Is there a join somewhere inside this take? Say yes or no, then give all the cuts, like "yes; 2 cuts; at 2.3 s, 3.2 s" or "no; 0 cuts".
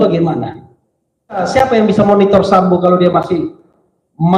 yes; 1 cut; at 1.4 s